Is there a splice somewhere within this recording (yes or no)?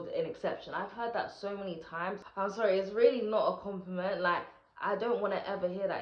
yes